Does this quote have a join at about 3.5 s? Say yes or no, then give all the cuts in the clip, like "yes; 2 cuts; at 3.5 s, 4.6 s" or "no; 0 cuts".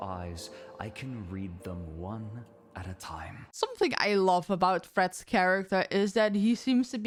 no; 0 cuts